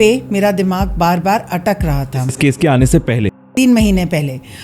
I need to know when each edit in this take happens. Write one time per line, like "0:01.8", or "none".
none